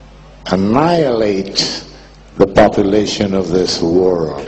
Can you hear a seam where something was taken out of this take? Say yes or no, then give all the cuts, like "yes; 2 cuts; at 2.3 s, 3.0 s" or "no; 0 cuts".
yes; 1 cut; at 1.0 s